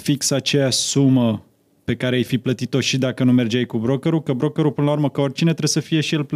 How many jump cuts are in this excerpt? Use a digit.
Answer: 0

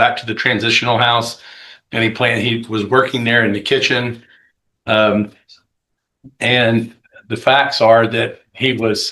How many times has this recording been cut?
0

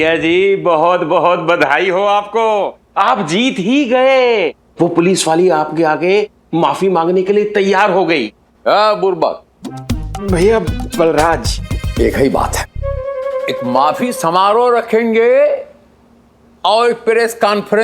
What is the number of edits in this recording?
1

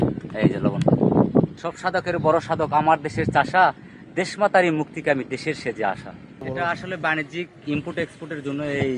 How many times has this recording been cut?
2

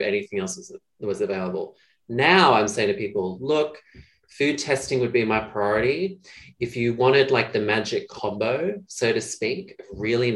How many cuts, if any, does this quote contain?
1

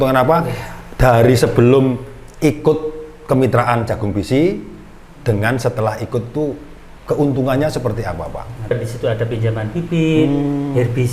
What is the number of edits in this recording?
1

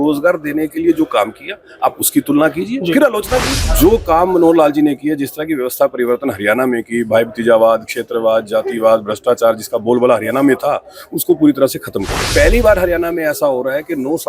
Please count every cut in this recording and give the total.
2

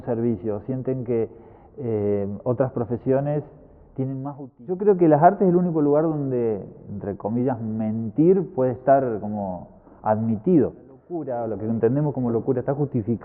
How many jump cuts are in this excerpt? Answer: 2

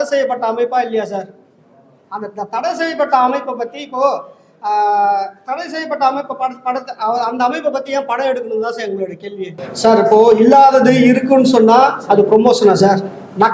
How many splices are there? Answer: 1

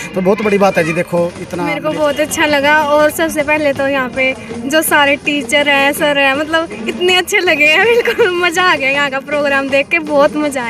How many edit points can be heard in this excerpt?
1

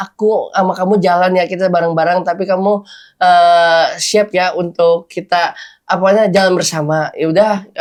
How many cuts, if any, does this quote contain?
0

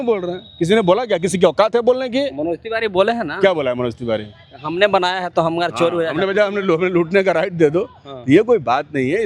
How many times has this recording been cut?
0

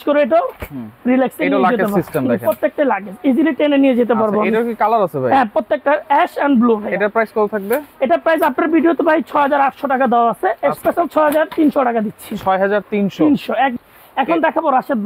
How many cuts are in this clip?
0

